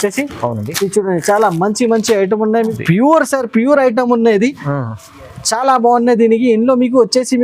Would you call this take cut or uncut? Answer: cut